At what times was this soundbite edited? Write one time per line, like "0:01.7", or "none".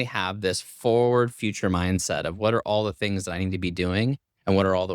none